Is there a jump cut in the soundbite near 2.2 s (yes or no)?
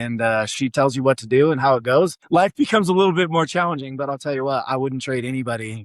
yes